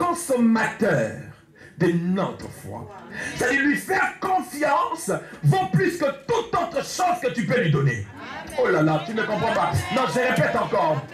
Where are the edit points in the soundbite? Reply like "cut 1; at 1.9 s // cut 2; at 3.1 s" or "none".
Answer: none